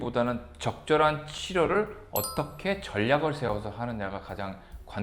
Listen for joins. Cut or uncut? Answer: uncut